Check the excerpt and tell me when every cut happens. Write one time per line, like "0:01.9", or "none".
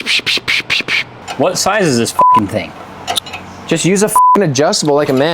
0:01.2